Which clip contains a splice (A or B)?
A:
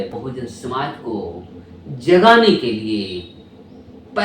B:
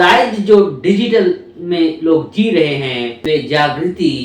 B